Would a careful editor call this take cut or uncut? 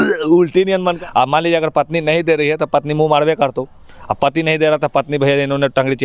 cut